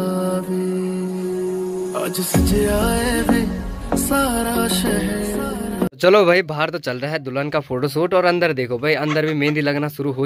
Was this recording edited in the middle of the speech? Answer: no; 0 cuts

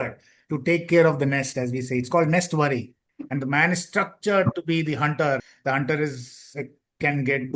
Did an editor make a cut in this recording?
yes; 1 cut; at 5.5 s

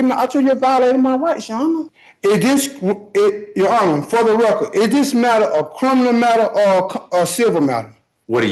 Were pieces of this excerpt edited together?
yes; 1 cut; at 2.0 s

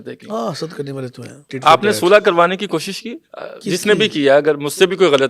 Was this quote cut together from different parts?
yes; 1 cut; at 1.5 s

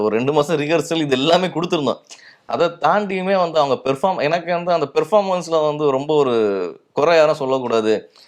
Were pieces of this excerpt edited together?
no; 0 cuts

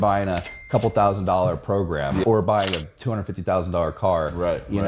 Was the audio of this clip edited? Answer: yes; 1 cut; at 2.2 s

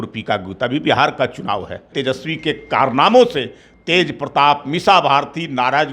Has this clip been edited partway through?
yes; 1 cut; at 1.9 s

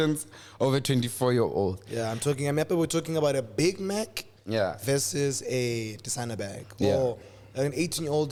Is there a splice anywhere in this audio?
no; 0 cuts

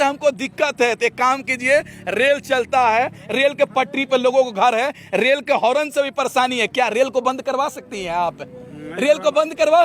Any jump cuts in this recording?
no; 0 cuts

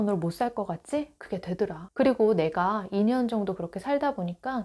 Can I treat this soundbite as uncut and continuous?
yes; 0 cuts

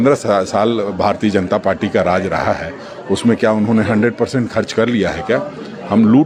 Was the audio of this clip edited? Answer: no; 0 cuts

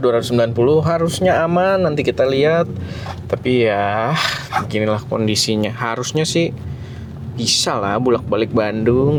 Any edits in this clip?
no; 0 cuts

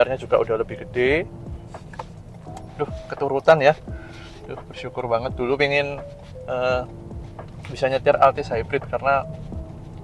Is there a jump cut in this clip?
no; 0 cuts

